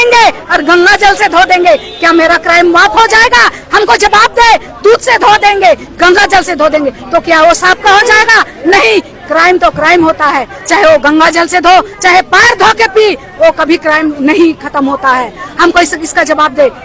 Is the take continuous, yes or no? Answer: yes